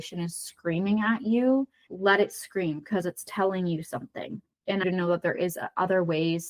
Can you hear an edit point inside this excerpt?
yes; 2 cuts; at 1.8 s, 4.8 s

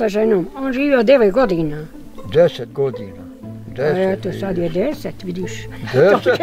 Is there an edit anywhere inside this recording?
no; 0 cuts

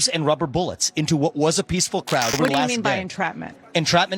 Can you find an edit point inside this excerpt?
yes; 1 cut; at 2.4 s

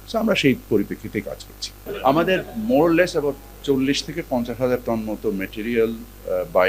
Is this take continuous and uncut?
no; 1 cut; at 1.4 s

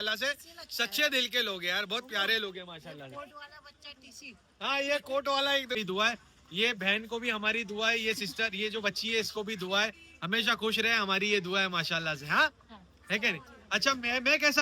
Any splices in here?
yes; 1 cut; at 5.8 s

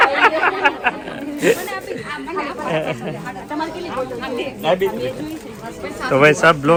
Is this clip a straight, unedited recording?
yes; 0 cuts

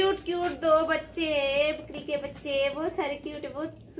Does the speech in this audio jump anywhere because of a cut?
no; 0 cuts

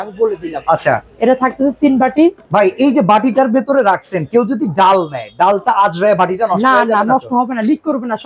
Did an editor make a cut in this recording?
no; 0 cuts

